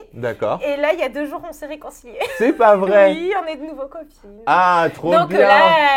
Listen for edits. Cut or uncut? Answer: uncut